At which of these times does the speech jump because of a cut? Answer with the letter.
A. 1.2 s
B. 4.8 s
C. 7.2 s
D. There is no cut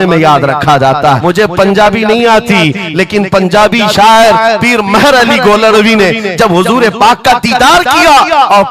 A